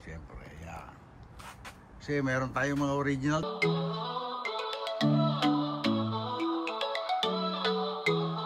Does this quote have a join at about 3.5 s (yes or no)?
yes